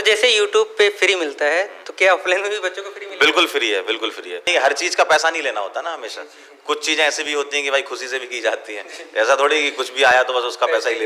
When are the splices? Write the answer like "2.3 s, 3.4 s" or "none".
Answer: 4.5 s